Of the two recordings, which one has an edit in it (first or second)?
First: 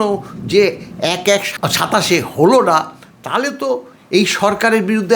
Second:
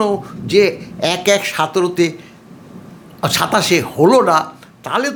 first